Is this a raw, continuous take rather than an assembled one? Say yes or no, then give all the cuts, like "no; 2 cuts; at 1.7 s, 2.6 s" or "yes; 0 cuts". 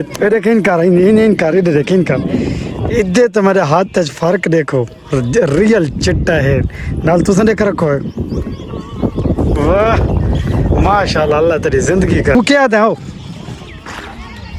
no; 1 cut; at 12.3 s